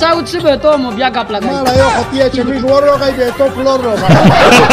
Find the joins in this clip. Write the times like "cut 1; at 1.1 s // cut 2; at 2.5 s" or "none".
none